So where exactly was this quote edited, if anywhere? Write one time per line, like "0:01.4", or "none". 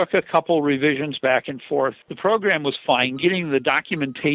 0:02.0